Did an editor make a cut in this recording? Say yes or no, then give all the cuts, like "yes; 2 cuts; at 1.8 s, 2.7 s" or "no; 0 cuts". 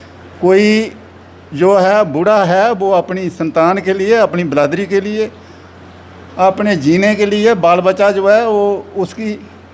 no; 0 cuts